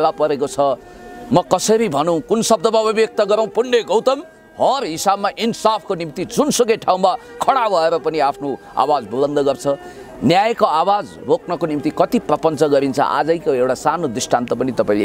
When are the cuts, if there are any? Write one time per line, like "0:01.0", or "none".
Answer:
none